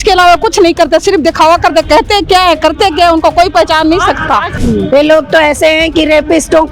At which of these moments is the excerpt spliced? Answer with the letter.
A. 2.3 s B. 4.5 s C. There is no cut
B